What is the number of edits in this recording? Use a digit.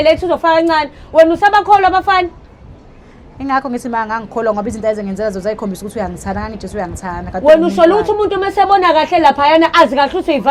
0